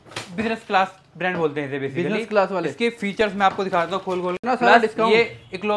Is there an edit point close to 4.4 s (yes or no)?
yes